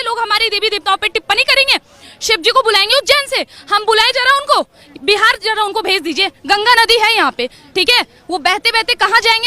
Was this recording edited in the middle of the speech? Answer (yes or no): no